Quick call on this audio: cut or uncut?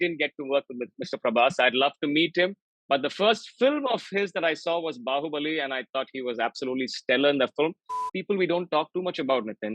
cut